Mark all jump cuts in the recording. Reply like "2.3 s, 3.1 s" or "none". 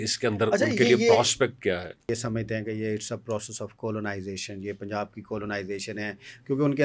2.1 s